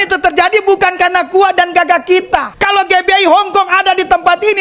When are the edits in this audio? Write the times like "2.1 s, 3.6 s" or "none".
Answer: 2.5 s